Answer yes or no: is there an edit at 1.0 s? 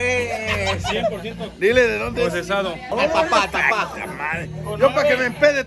no